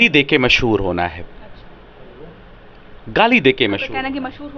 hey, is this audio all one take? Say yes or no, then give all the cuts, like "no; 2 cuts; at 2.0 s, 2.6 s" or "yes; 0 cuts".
yes; 0 cuts